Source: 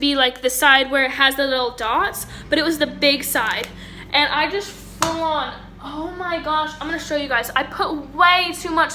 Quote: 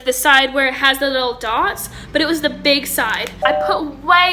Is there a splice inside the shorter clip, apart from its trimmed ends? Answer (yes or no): yes